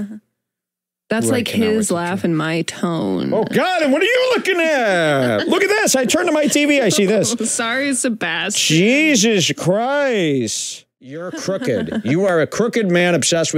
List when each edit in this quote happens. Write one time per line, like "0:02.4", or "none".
0:11.3